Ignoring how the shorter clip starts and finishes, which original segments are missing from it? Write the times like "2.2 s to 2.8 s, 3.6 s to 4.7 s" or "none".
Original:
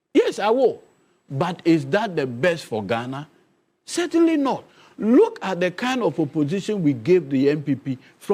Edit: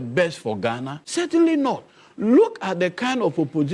3.2 s to 3.8 s